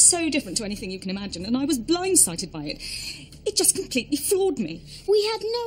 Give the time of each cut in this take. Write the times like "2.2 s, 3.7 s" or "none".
none